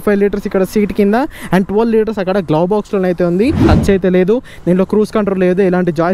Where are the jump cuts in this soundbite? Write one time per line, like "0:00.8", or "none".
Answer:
0:03.6